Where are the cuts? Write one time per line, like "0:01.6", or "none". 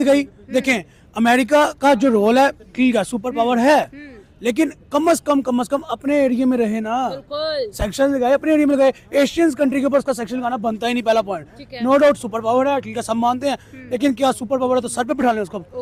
none

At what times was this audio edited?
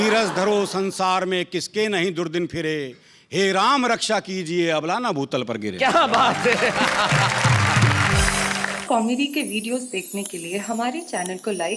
0:08.7

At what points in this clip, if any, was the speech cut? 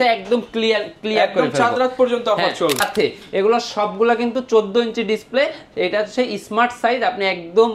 0:02.8

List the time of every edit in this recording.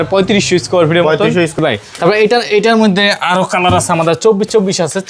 0:01.6

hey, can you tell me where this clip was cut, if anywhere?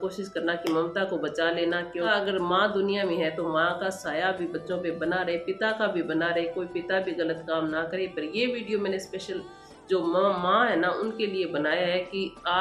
0:02.1

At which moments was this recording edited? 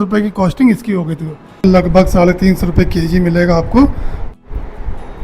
0:01.6

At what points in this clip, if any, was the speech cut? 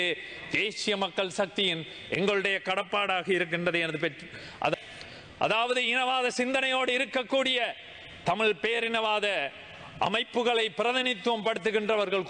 0:04.7

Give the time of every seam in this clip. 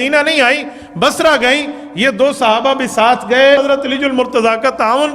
0:03.6

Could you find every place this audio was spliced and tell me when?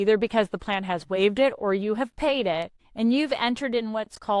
0:02.8

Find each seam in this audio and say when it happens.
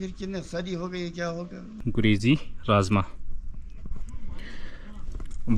0:01.8

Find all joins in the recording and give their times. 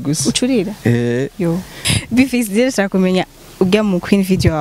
0:01.8

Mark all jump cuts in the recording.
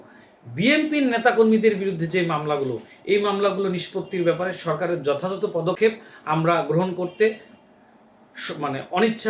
none

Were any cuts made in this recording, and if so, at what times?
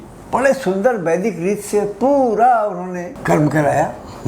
0:03.1

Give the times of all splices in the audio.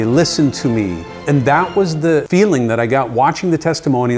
0:01.1
0:02.3

